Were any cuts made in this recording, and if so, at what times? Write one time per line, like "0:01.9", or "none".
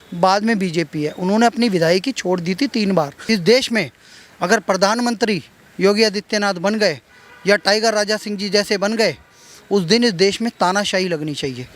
0:03.2